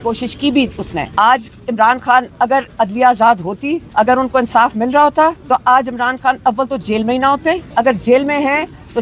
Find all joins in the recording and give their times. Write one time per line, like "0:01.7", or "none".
0:01.1
0:03.8
0:05.4
0:07.7